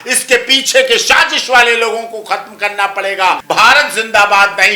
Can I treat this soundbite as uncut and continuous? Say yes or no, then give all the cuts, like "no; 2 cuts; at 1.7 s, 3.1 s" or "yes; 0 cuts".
no; 1 cut; at 3.4 s